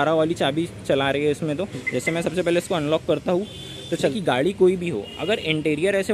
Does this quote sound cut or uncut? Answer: cut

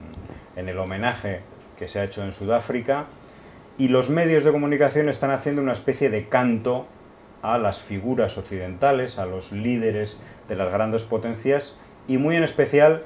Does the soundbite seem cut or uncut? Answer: uncut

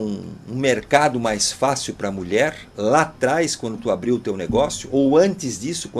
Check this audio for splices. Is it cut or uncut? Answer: uncut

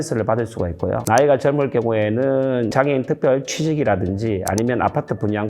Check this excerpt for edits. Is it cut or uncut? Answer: cut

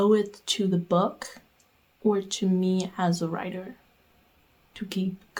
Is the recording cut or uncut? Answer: uncut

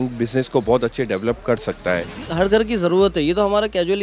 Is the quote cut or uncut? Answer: cut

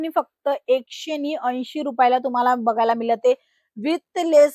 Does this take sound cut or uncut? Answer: uncut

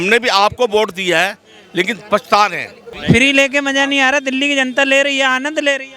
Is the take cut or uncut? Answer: cut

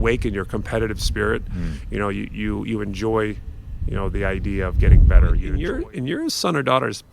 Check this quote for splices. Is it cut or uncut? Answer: cut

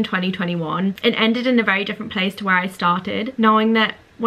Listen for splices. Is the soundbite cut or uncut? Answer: cut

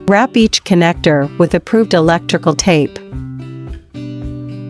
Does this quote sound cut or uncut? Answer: uncut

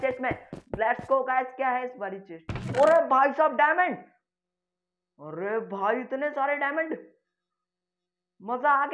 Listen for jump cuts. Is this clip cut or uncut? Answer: cut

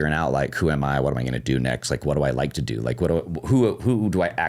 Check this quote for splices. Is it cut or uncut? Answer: uncut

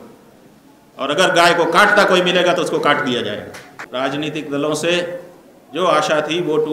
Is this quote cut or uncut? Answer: cut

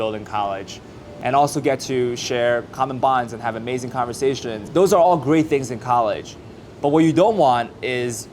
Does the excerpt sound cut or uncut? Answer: cut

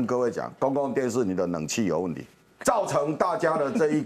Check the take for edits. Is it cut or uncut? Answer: cut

